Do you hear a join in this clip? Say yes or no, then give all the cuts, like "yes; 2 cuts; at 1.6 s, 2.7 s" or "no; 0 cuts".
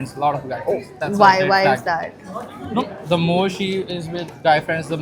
no; 0 cuts